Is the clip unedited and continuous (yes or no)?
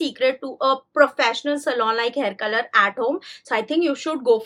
yes